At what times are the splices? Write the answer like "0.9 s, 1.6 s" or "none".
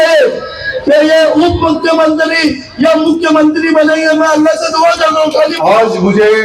5.5 s